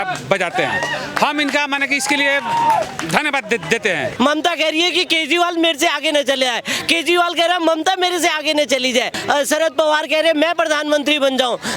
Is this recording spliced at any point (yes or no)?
yes